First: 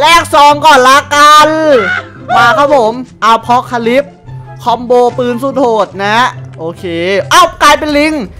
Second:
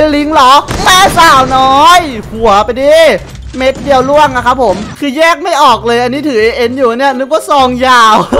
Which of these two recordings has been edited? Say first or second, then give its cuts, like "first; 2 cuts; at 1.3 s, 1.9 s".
second; 1 cut; at 4.9 s